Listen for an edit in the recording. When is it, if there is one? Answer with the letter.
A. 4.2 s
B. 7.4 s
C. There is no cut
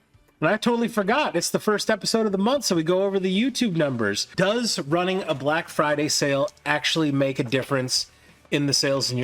A